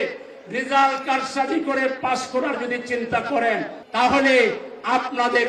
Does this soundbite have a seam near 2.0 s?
no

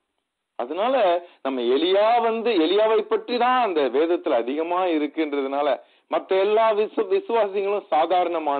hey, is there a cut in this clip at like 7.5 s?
no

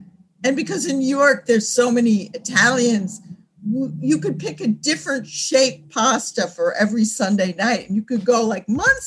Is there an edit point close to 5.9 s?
no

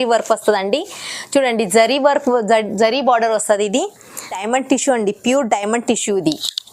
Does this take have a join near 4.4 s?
yes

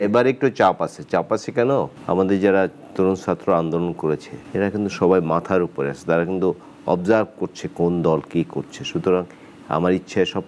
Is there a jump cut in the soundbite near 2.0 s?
yes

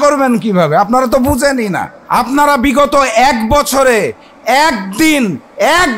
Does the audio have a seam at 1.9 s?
yes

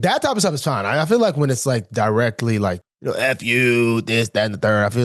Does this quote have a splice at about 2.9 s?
yes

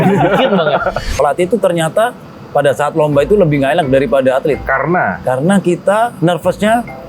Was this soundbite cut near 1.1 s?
yes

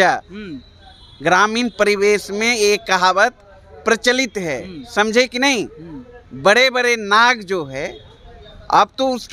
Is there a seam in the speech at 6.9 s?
no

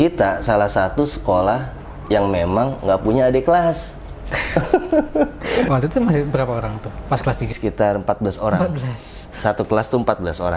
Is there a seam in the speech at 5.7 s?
yes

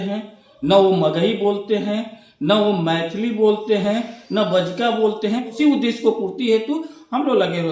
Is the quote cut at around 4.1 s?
no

